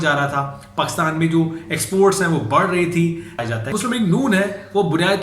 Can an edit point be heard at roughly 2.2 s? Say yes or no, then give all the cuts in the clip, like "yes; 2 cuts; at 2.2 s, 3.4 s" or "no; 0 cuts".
no; 1 cut; at 3.6 s